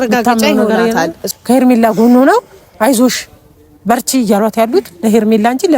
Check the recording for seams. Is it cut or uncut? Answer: cut